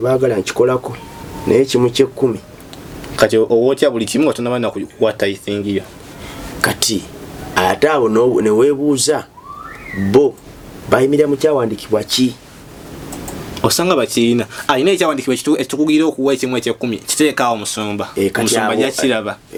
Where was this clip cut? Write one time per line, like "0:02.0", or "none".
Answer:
none